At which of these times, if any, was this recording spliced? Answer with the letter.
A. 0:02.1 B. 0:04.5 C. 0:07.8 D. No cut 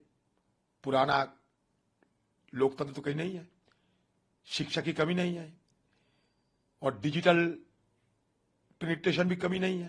D